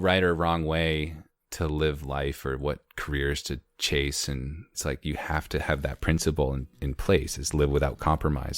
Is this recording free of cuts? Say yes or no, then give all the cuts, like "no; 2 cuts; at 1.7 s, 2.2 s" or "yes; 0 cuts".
no; 1 cut; at 4.7 s